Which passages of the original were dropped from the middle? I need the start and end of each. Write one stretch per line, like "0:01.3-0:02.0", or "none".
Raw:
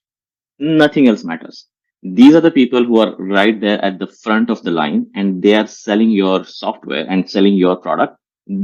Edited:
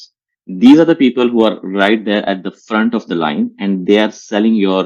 none